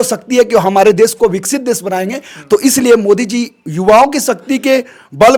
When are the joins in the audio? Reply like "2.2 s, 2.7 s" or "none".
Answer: none